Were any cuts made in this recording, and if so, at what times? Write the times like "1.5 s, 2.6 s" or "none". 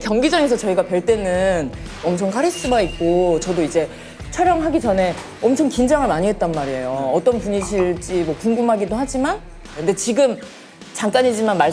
none